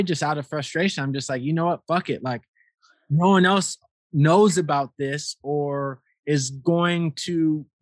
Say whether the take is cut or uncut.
uncut